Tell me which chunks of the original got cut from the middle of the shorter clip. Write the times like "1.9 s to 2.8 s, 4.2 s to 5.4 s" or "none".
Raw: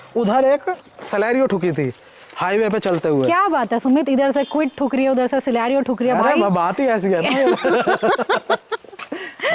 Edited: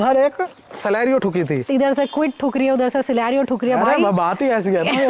2.0 s to 4.1 s